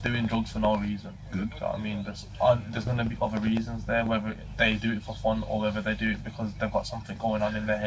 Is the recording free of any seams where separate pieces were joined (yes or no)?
yes